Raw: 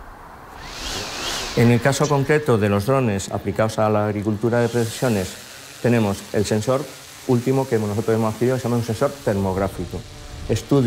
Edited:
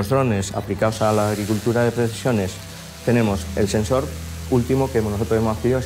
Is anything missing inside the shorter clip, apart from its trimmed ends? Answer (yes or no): no